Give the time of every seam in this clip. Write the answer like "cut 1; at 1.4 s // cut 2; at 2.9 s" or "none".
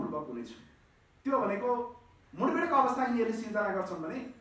none

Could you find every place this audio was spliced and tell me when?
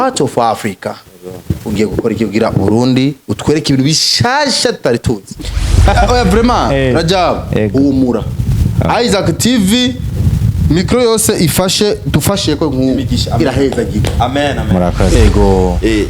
cut 1; at 5.8 s // cut 2; at 15.1 s

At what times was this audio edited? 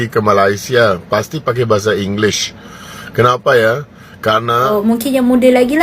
cut 1; at 4.7 s

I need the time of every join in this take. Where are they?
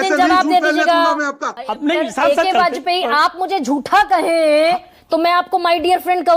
cut 1; at 1.6 s

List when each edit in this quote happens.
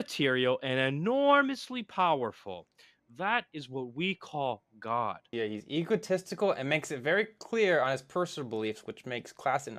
cut 1; at 5.2 s

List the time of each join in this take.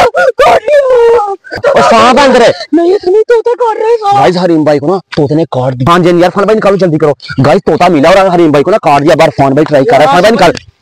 cut 1; at 1.0 s // cut 2; at 5.8 s

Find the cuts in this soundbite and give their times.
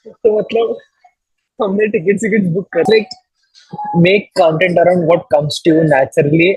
cut 1; at 2.9 s

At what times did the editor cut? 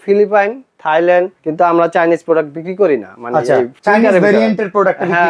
none

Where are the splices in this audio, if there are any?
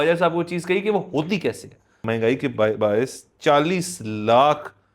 cut 1; at 2.0 s

